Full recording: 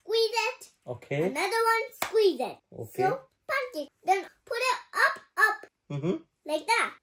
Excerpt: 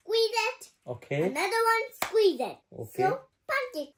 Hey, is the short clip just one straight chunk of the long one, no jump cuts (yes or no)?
yes